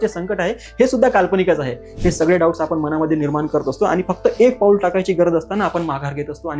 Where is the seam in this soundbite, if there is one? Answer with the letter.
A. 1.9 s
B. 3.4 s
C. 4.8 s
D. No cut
A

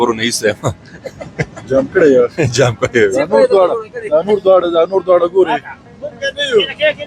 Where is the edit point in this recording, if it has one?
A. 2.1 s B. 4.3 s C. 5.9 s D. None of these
D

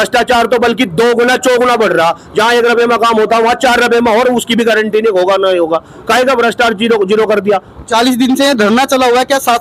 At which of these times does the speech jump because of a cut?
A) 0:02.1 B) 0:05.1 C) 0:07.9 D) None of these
D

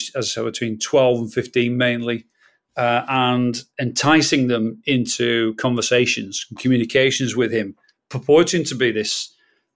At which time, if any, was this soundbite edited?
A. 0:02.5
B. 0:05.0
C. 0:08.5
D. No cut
D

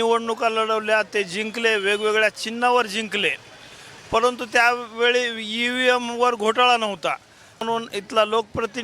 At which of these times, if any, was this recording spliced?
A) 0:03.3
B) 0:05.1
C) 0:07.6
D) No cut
C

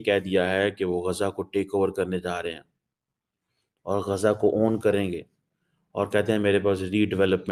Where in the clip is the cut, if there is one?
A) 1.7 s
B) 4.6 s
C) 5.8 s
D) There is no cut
D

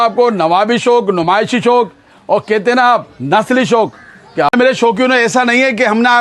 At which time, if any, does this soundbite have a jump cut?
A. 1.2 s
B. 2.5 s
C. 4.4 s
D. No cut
C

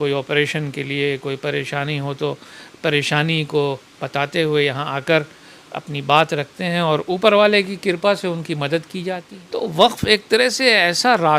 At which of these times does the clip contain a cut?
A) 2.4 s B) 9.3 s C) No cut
B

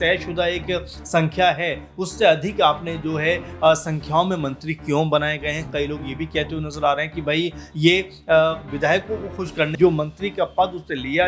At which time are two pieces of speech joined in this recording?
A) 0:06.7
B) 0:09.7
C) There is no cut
B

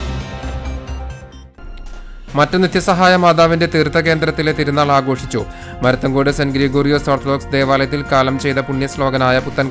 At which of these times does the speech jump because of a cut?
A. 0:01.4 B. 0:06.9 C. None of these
A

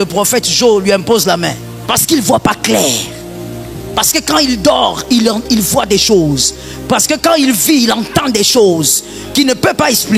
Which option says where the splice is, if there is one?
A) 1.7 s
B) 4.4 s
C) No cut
A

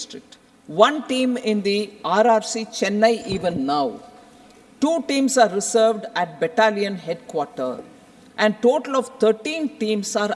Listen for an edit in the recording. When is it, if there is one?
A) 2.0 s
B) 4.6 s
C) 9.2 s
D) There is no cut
D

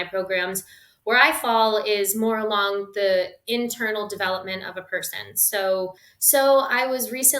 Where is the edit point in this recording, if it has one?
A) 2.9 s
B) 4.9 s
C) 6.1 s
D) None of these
C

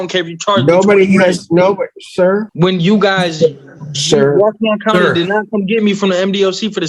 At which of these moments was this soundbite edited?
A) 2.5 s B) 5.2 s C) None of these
A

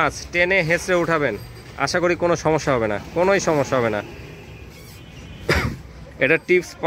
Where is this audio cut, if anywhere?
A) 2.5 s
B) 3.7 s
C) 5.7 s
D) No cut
D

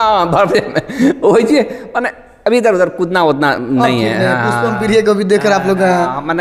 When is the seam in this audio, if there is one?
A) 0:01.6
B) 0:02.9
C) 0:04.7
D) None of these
D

